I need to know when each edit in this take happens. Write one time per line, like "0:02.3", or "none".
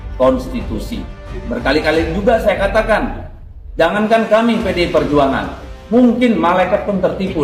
none